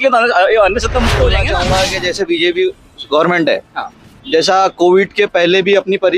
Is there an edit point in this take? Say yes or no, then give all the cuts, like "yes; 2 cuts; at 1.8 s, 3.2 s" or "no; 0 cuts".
yes; 1 cut; at 1.5 s